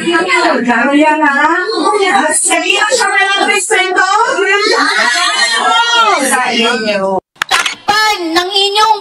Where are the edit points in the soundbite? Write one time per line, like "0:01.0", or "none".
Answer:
0:07.3